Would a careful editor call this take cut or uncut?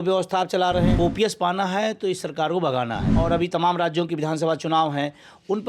cut